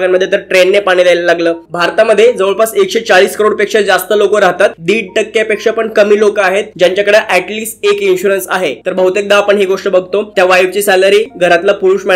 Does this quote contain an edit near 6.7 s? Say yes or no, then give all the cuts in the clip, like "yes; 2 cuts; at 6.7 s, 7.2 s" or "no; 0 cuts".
no; 4 cuts; at 1.6 s, 4.8 s, 8.8 s, 11.3 s